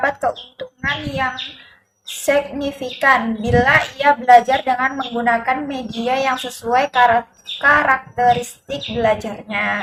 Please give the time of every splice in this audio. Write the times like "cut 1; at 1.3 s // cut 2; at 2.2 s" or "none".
none

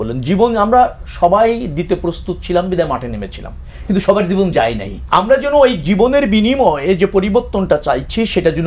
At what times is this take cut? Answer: cut 1; at 4.9 s

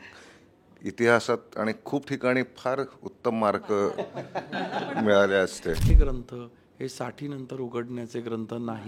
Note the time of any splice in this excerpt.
cut 1; at 5.9 s

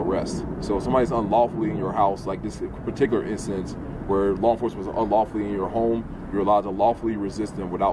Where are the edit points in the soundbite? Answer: none

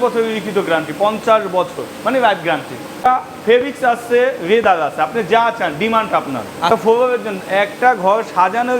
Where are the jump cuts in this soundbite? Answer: cut 1; at 3.0 s // cut 2; at 6.7 s

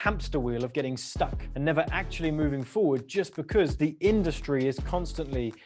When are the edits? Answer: cut 1; at 1.4 s

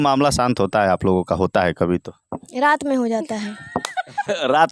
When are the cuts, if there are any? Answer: none

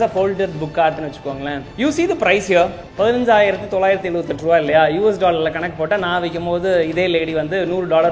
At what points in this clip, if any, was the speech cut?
cut 1; at 1.6 s // cut 2; at 2.8 s

